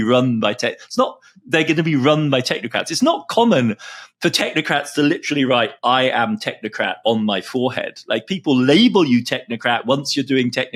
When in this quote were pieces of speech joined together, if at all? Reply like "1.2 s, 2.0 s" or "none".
none